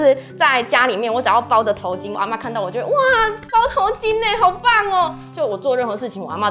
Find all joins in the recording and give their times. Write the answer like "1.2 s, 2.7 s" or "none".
2.1 s